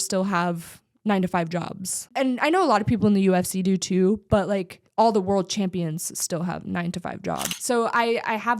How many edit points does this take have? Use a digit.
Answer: 2